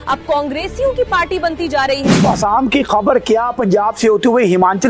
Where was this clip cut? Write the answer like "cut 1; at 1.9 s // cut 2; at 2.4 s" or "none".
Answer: cut 1; at 2.2 s